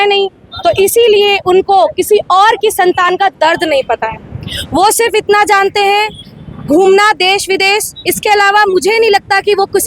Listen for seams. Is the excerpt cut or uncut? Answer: uncut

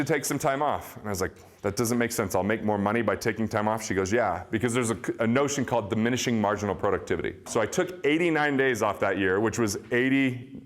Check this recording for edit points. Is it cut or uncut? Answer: cut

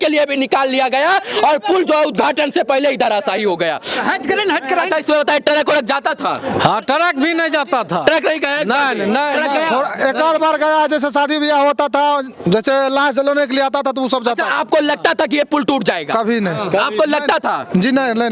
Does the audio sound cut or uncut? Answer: uncut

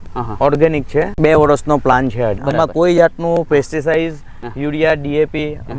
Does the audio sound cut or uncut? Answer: cut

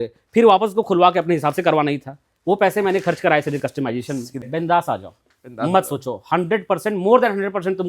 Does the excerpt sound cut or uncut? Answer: cut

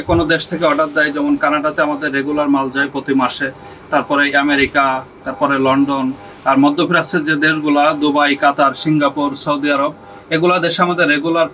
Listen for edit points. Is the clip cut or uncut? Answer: uncut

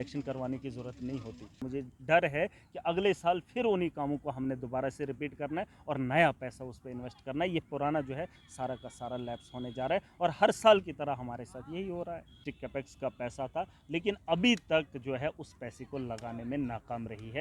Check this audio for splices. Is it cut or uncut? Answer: cut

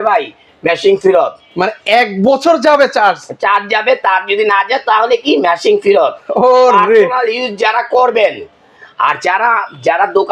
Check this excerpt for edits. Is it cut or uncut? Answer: uncut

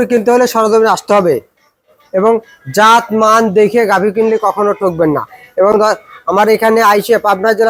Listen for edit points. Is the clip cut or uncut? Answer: uncut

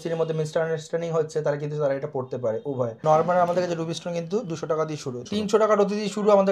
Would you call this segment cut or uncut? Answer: cut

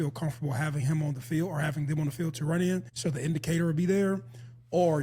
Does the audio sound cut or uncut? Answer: cut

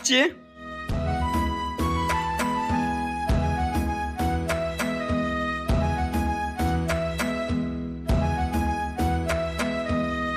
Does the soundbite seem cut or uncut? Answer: uncut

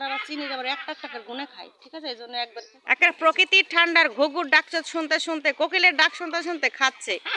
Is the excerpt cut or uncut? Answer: cut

